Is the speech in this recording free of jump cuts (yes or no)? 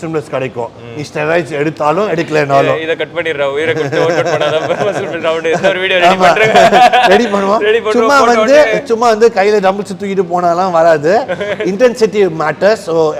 yes